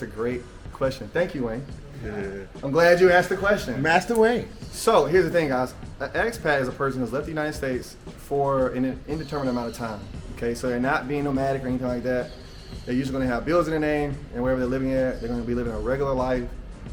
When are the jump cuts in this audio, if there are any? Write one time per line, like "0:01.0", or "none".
none